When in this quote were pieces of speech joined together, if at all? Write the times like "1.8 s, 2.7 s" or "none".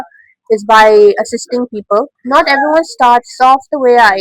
2.2 s